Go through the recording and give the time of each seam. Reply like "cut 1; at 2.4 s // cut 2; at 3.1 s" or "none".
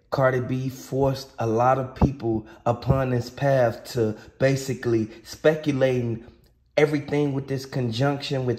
none